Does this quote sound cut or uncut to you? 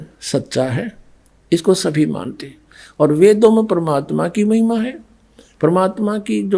uncut